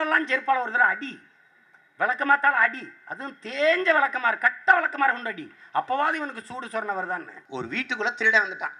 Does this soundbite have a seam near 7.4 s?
yes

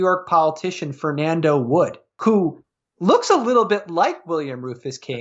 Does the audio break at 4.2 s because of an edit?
no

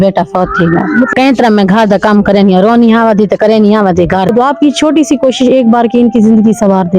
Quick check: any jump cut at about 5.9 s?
no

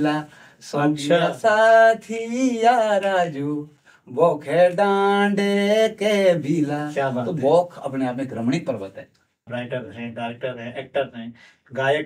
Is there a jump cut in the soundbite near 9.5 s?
yes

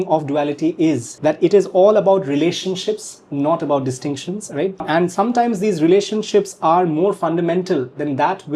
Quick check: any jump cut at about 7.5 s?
no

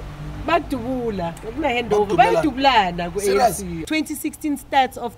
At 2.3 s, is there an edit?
no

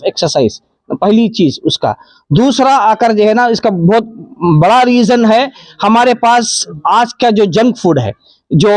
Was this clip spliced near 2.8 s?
no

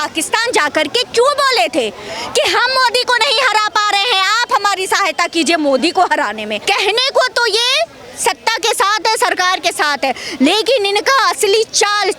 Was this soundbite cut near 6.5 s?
yes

